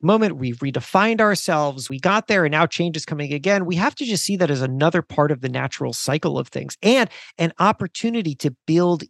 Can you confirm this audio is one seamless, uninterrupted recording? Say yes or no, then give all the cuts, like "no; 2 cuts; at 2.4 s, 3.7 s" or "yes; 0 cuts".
no; 1 cut; at 1.9 s